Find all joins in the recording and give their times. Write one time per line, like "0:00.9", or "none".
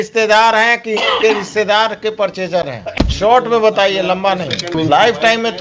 0:02.9
0:04.7